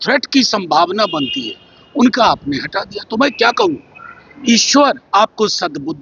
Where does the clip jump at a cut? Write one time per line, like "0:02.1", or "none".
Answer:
none

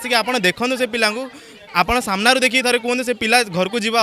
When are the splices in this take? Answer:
none

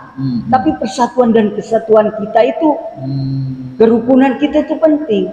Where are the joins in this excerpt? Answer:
none

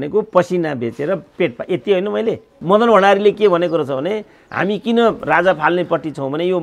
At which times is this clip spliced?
0:02.5

